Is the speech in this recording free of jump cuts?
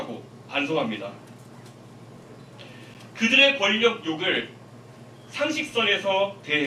yes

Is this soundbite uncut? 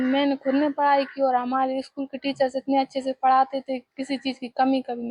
yes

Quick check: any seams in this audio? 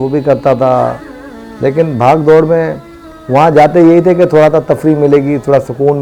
no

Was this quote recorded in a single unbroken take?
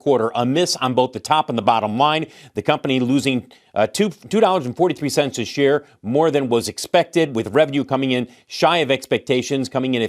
yes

